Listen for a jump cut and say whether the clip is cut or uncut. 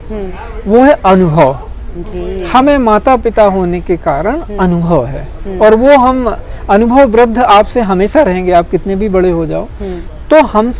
uncut